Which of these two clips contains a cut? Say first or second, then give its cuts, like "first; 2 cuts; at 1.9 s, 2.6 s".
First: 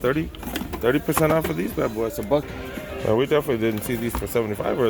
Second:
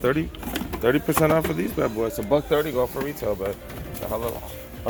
first; 1 cut; at 2.5 s